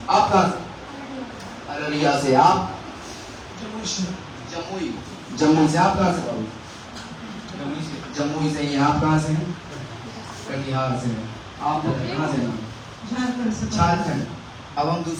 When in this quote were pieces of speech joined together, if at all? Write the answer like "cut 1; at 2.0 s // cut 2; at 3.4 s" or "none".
none